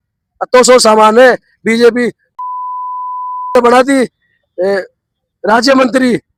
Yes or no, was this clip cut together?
no